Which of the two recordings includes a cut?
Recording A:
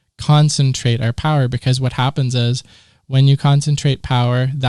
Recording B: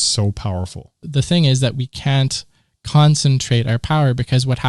B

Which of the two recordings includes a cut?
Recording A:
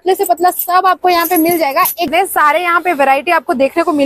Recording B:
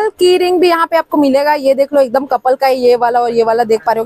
A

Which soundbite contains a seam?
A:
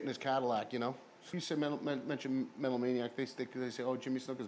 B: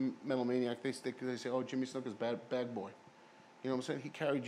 A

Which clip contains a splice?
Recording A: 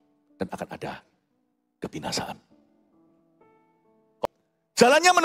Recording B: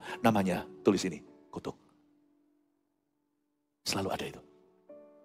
A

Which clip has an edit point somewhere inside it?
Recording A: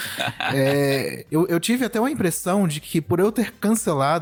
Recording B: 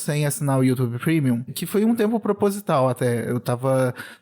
B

